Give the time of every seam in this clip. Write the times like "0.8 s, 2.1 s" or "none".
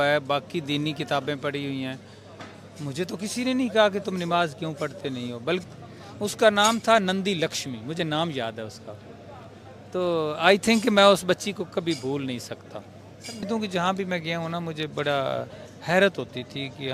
5.6 s, 13.3 s